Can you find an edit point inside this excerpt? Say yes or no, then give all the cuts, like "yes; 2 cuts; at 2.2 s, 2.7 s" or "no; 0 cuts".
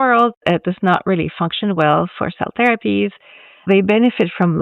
yes; 1 cut; at 3.7 s